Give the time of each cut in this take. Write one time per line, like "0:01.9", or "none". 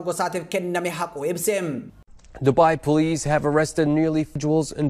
0:02.0